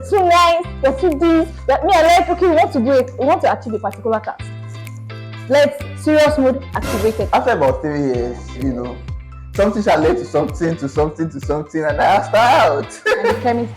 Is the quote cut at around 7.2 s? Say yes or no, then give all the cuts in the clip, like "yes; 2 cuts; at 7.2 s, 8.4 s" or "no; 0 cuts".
yes; 1 cut; at 7.2 s